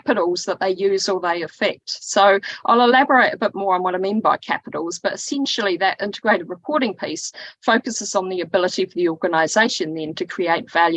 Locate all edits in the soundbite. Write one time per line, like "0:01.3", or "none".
none